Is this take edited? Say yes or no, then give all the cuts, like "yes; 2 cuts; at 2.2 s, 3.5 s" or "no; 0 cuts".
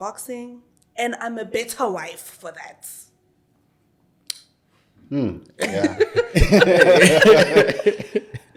no; 0 cuts